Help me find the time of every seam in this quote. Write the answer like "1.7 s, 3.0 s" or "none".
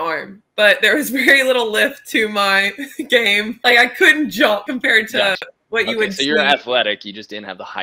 3.6 s, 4.7 s